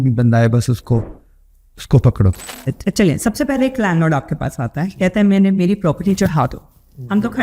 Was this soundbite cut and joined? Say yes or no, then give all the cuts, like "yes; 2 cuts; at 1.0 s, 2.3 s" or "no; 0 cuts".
yes; 1 cut; at 2.5 s